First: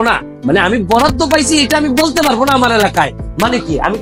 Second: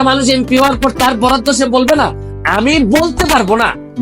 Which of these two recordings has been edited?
second; 1 cut; at 2.2 s

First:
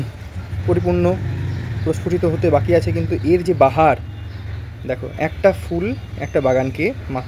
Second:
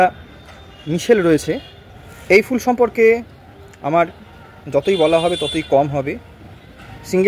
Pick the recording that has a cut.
second; 1 cut; at 1.4 s

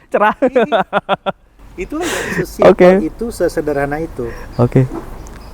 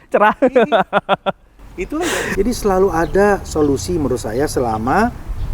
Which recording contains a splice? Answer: second; 1 cut; at 2.2 s

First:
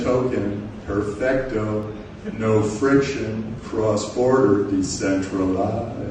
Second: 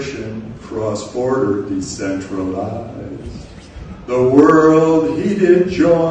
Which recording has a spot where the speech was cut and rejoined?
second; 1 cut; at 4.7 s

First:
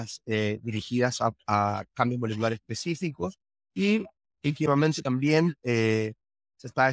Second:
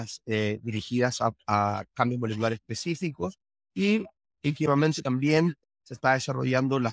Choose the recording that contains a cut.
second; 1 cut; at 5.6 s

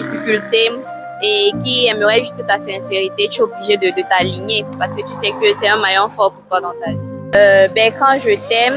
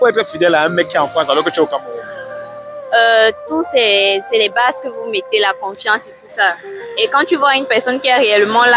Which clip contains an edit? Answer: first; 1 cut; at 7.1 s

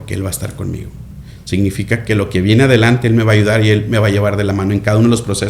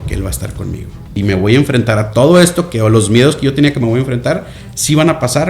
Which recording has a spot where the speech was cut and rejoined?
second; 1 cut; at 1.1 s

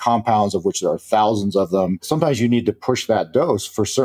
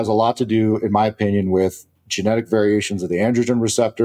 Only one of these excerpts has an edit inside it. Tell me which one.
first; 1 cut; at 2.1 s

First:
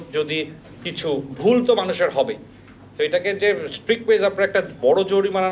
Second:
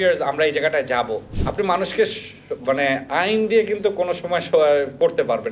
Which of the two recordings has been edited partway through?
second; 1 cut; at 1.3 s

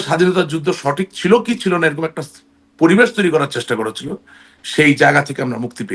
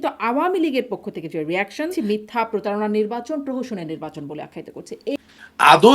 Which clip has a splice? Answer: second; 2 cuts; at 1.9 s, 5.1 s

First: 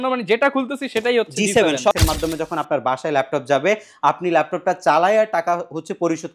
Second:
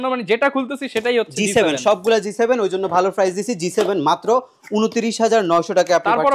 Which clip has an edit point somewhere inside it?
first; 1 cut; at 1.9 s

